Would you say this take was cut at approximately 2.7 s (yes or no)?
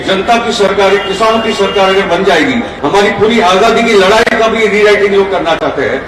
yes